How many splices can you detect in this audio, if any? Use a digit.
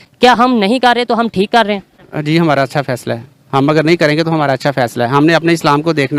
0